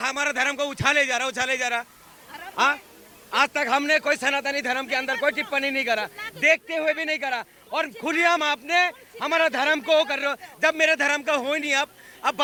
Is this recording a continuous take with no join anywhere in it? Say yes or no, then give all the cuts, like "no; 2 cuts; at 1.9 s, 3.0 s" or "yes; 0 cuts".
yes; 0 cuts